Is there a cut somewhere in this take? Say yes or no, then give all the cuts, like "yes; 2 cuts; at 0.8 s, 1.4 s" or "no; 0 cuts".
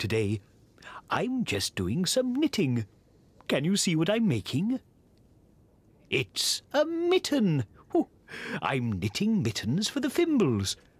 no; 0 cuts